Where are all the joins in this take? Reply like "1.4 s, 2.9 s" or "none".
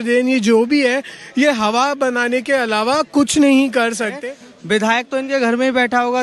4.2 s